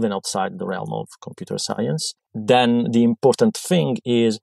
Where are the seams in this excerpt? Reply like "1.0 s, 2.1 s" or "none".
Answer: 2.2 s